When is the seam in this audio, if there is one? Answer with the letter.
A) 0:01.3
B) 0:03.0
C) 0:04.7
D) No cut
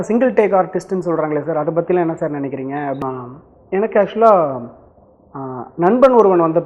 B